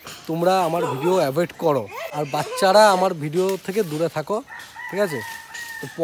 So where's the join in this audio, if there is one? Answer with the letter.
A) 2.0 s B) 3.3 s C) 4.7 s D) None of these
A